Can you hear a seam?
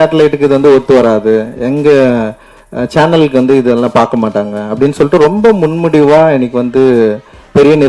no; 0 cuts

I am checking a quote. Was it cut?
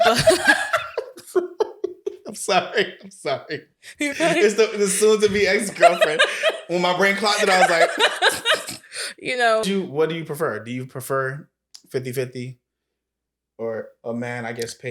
yes; 1 cut; at 9.6 s

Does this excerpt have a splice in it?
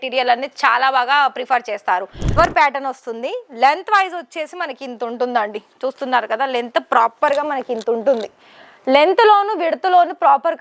yes; 1 cut; at 2.3 s

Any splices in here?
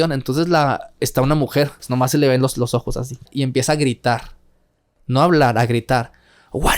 yes; 2 cuts; at 1.9 s, 3.3 s

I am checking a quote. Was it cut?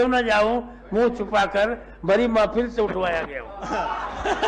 no; 0 cuts

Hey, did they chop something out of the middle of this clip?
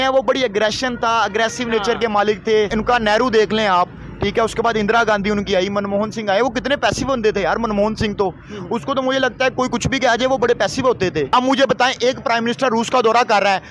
yes; 2 cuts; at 2.7 s, 11.3 s

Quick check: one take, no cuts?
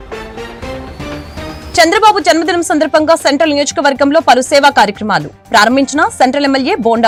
yes; 0 cuts

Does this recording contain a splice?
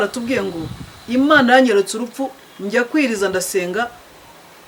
no; 0 cuts

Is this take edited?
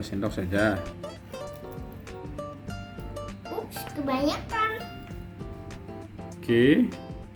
no; 0 cuts

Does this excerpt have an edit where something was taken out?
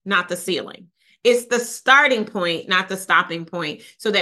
no; 0 cuts

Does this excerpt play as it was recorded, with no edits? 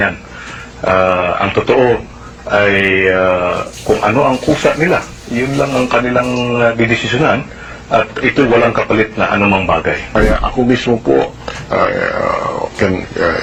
yes; 0 cuts

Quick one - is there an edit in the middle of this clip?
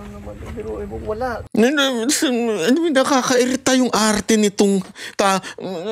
no; 0 cuts

